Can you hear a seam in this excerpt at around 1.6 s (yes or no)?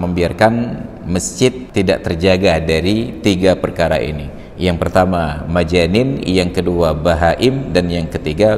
yes